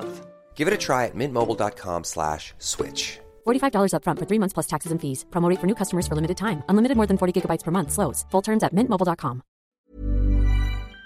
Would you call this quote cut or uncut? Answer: cut